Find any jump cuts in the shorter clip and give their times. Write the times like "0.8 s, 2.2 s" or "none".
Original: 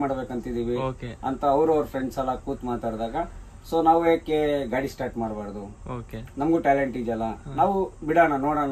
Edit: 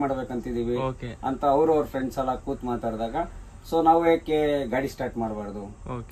none